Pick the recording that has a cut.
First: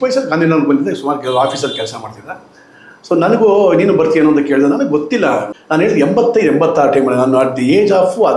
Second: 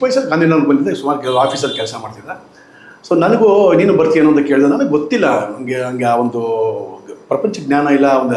first; 1 cut; at 5.5 s

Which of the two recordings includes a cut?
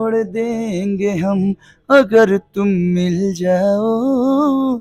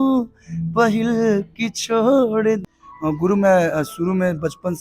second; 1 cut; at 2.6 s

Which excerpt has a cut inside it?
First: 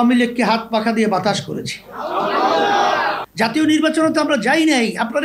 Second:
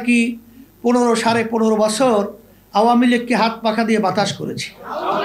first; 1 cut; at 3.2 s

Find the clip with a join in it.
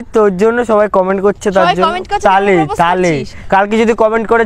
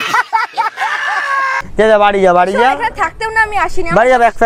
second; 1 cut; at 1.6 s

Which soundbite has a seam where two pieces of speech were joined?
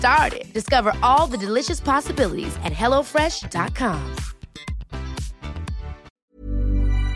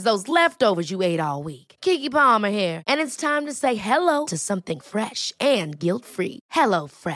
first; 1 cut; at 6.1 s

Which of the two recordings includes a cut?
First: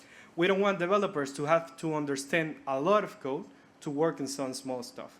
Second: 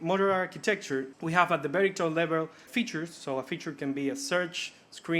second; 2 cuts; at 1.1 s, 2.6 s

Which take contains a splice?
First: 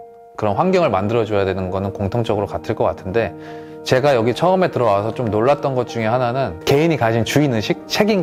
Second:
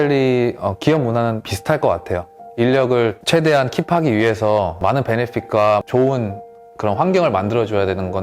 second; 3 cuts; at 1.5 s, 3.2 s, 4.8 s

